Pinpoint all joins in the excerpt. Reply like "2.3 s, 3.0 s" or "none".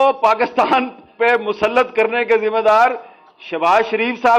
none

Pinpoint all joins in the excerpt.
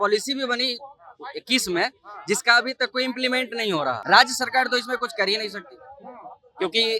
4.0 s

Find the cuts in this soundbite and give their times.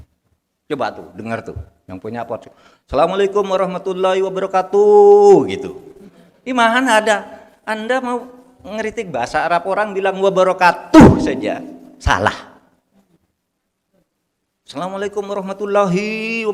none

